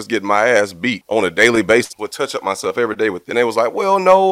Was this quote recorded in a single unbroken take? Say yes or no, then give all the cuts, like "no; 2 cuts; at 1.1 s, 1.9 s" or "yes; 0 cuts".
no; 3 cuts; at 1.0 s, 2.0 s, 3.2 s